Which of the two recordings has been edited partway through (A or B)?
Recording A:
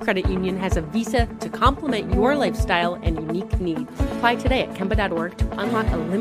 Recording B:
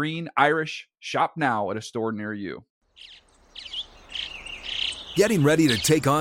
B